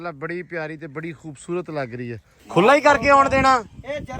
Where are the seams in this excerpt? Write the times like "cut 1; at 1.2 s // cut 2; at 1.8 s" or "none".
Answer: cut 1; at 2.3 s